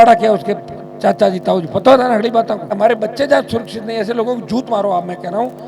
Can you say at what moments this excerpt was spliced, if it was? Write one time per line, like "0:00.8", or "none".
0:02.8